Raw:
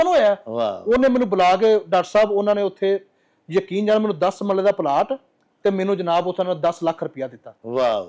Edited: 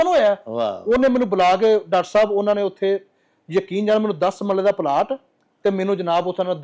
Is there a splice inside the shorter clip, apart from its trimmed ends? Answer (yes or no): no